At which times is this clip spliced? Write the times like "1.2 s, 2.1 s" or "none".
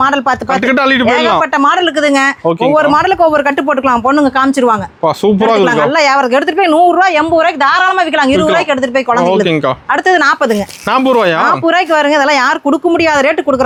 none